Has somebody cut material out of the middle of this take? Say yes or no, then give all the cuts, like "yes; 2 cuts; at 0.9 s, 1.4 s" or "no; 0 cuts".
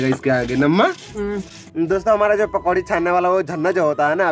yes; 1 cut; at 1.6 s